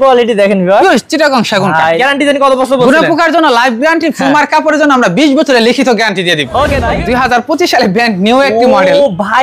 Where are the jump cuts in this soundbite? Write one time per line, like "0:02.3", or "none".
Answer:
0:02.0
0:06.9